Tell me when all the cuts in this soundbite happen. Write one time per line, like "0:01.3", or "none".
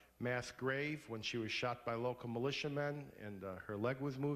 none